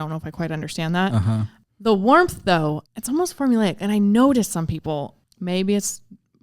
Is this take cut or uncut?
cut